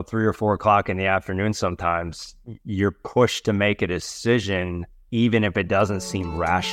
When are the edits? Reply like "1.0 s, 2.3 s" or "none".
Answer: none